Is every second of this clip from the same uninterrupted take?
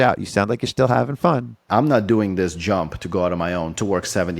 no; 1 cut; at 1.6 s

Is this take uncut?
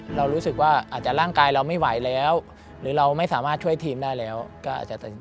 no; 1 cut; at 0.9 s

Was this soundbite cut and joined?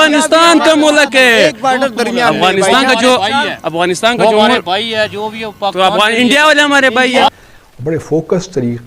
yes; 1 cut; at 7.3 s

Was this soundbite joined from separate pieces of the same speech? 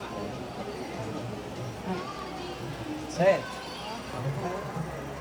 no; 0 cuts

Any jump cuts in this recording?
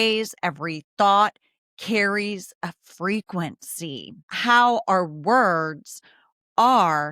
yes; 1 cut; at 4.1 s

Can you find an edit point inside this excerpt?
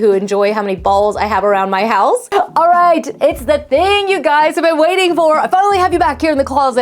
yes; 1 cut; at 2.2 s

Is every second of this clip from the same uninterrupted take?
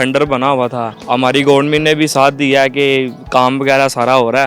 no; 1 cut; at 0.9 s

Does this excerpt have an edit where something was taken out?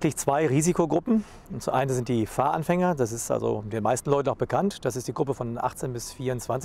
no; 0 cuts

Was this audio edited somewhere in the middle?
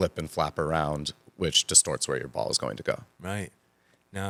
no; 0 cuts

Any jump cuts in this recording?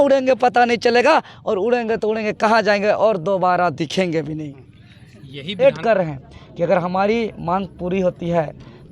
yes; 1 cut; at 5.6 s

